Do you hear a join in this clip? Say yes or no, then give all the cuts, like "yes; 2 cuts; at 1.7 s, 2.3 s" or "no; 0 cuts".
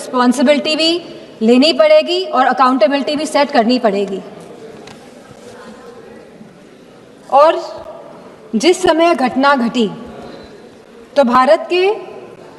no; 0 cuts